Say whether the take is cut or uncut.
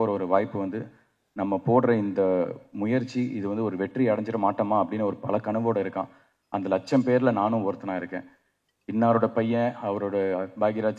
uncut